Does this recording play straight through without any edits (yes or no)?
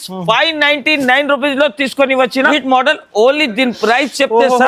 no